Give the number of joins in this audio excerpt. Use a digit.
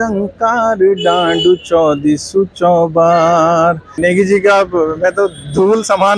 1